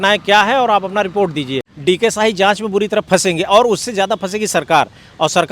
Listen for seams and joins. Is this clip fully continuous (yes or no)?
no